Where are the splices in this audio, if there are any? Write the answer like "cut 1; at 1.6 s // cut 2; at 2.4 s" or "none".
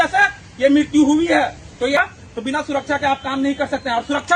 cut 1; at 2.0 s